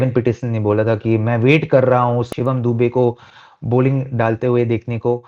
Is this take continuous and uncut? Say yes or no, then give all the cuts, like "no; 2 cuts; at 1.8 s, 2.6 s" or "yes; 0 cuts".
yes; 0 cuts